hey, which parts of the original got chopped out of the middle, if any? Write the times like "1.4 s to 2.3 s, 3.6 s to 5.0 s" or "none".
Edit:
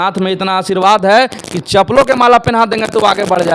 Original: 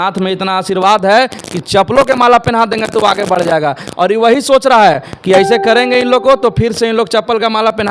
none